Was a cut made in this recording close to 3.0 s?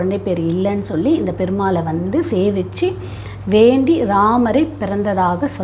no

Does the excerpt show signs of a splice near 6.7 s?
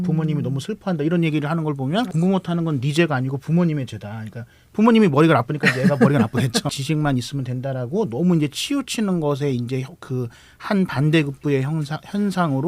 yes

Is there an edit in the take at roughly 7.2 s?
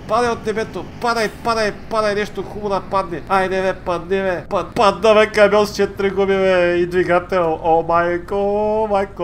no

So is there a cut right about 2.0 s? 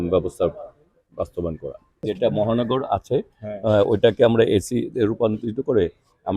yes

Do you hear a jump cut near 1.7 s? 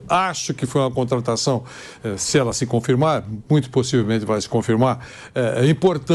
no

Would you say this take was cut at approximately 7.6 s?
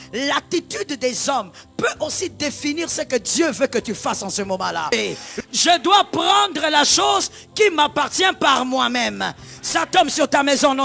no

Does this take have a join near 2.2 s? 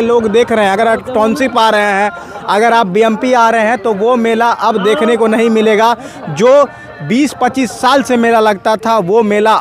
no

